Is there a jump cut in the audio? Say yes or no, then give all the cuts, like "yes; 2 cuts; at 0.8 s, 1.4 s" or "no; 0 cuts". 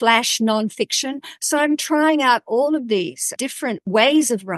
yes; 1 cut; at 3.4 s